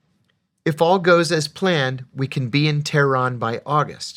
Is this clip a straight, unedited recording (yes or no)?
yes